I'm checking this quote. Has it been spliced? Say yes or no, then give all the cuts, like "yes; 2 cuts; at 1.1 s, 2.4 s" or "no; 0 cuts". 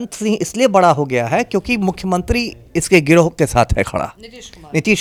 no; 0 cuts